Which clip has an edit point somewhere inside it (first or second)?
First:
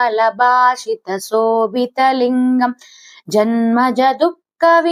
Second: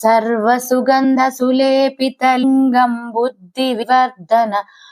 second